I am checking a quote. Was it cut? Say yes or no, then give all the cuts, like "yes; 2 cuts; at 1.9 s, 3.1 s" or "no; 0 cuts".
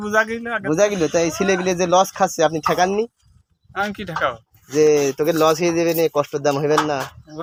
no; 0 cuts